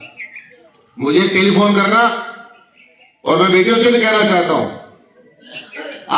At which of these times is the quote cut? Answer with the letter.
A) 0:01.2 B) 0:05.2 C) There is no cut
C